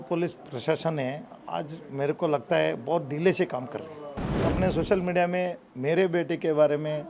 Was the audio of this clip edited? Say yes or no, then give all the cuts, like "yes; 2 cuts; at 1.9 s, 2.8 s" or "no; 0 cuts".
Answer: yes; 1 cut; at 4.4 s